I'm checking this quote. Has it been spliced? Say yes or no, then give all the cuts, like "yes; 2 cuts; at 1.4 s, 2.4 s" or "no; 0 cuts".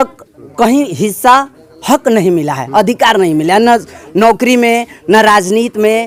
no; 0 cuts